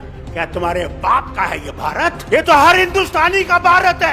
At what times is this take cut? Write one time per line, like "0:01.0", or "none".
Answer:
0:02.2